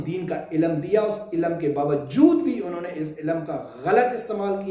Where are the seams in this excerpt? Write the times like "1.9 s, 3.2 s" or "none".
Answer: none